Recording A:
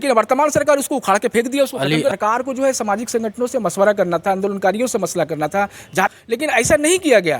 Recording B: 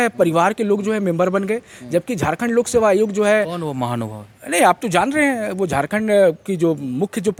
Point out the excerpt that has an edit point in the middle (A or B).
A